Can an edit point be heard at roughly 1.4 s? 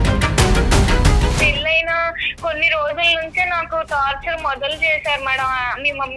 yes; 1 cut; at 1.4 s

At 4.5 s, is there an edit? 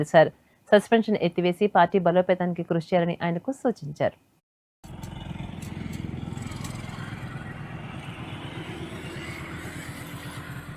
no; 0 cuts

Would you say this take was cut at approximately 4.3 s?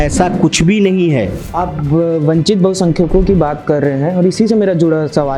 no; 1 cut; at 1.4 s

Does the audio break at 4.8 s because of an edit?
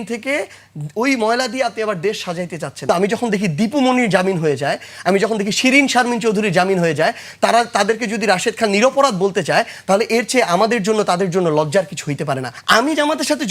no; 2 cuts; at 2.8 s, 12.5 s

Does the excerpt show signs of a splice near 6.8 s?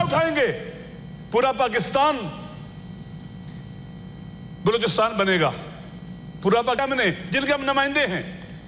yes; 1 cut; at 6.8 s

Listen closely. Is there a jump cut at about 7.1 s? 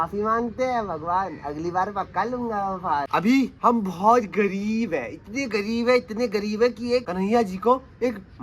yes; 2 cuts; at 3.1 s, 7.1 s

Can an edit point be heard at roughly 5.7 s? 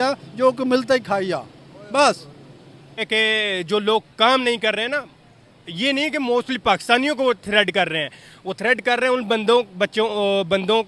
no; 1 cut; at 3.1 s

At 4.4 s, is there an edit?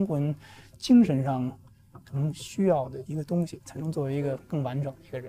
yes; 2 cuts; at 3.0 s, 4.4 s

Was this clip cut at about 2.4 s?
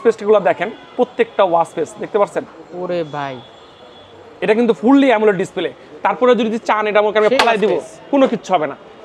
no; 0 cuts

